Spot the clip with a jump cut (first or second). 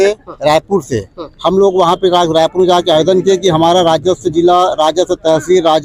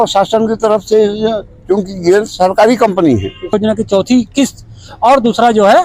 second